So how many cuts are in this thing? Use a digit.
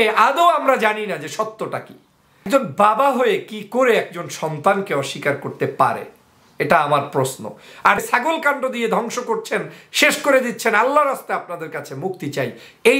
2